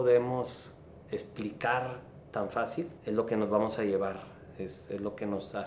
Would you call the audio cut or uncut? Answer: cut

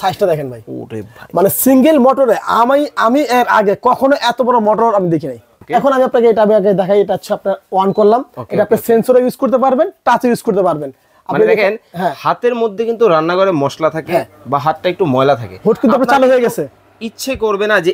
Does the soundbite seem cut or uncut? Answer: cut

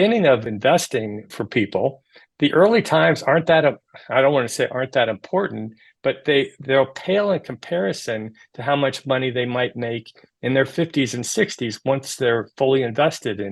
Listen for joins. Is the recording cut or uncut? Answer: cut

